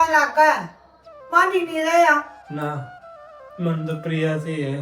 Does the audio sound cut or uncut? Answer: uncut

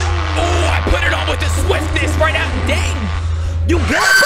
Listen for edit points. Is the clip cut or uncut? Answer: uncut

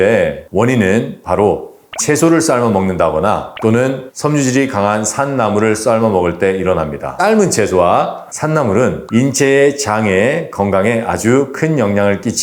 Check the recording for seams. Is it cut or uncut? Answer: cut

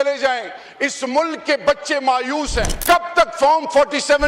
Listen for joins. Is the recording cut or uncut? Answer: cut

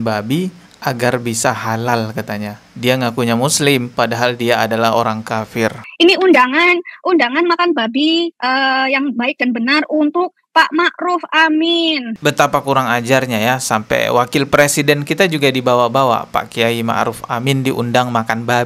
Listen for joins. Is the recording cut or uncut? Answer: cut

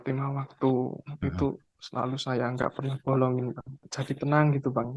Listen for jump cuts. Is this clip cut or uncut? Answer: cut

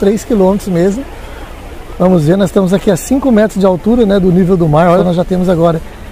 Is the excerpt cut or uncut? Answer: cut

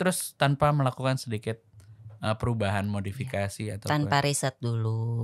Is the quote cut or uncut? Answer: uncut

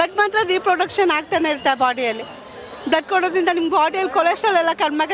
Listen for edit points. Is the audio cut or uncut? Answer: uncut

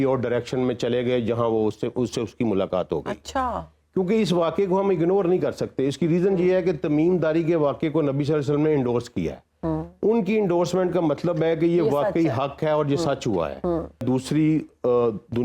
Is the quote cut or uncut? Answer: cut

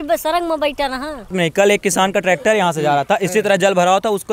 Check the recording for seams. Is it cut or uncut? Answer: cut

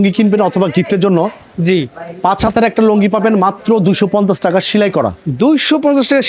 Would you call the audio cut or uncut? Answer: uncut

